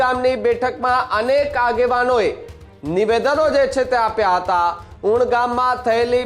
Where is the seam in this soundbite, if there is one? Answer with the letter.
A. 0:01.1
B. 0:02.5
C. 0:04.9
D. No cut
C